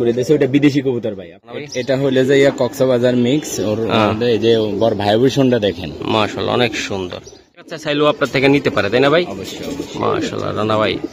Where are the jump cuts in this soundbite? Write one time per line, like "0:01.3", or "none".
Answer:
0:01.7
0:07.5